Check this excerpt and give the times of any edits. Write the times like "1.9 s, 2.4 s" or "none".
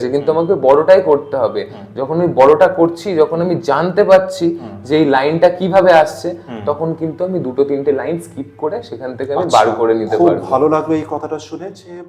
none